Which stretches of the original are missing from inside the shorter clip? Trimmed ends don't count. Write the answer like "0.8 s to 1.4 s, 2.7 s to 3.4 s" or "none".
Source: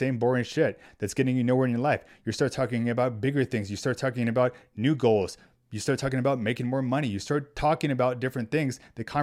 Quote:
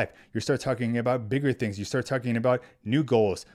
none